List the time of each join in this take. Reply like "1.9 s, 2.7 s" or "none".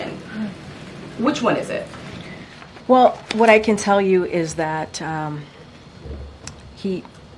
none